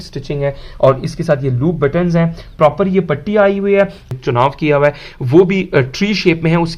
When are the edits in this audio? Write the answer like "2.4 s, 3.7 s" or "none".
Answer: 4.0 s